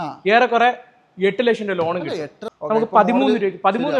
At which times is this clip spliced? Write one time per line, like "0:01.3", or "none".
0:02.4